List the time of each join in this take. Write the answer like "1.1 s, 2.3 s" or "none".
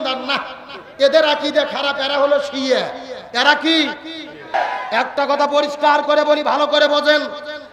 4.5 s